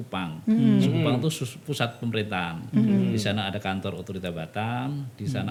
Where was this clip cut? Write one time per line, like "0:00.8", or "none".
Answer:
none

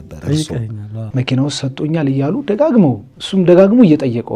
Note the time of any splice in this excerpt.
0:01.1

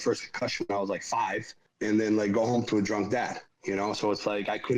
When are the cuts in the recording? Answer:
0:01.6

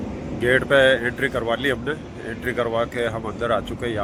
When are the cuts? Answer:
none

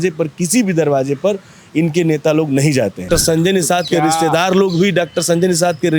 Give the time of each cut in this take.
0:03.0

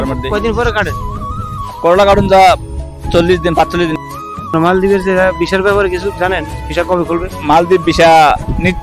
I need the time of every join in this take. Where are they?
0:04.4

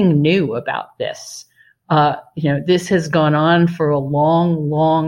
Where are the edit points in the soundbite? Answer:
none

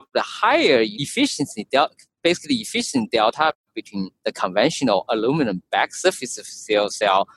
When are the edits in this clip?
0:00.9

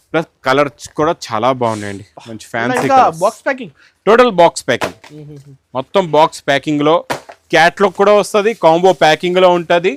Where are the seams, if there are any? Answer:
none

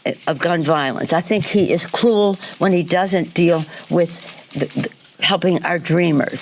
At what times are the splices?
0:01.0
0:02.4

